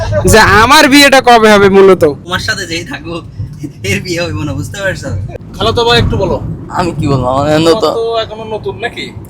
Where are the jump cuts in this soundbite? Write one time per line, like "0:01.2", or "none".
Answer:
0:02.3
0:05.3